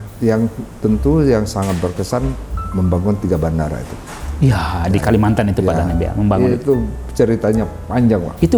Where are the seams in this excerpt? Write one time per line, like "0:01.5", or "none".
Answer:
none